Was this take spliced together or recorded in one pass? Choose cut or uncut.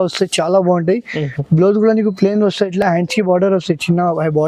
uncut